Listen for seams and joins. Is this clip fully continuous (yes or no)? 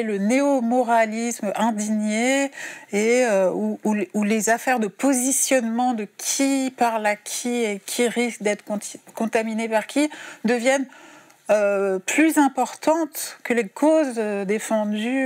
yes